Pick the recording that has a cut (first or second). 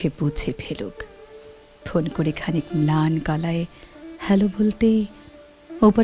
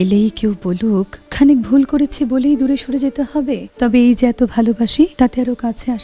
second